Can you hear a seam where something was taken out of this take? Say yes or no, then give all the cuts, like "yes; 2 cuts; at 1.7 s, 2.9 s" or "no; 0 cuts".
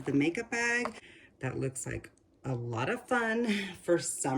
yes; 1 cut; at 1.1 s